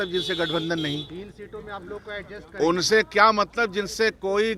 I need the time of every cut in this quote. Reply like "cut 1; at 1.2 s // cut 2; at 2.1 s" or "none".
none